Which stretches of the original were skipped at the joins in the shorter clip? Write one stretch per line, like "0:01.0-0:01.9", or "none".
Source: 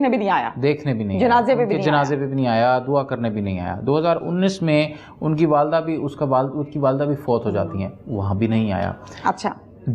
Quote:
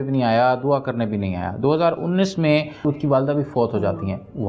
0:05.0-0:06.5